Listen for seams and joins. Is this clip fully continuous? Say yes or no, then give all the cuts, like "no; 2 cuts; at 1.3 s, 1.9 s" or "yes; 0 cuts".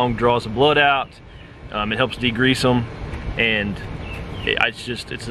yes; 0 cuts